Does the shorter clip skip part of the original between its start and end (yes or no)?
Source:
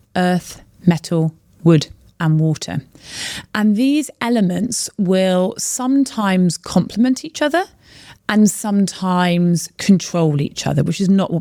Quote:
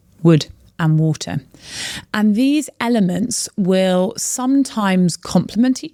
no